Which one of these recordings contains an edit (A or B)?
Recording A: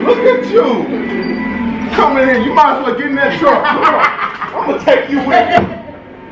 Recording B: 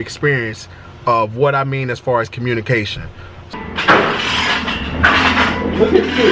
B